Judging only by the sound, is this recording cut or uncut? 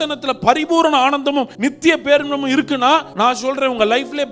cut